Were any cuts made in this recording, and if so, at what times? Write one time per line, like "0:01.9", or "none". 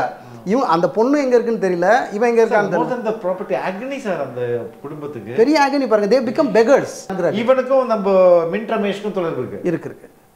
0:07.1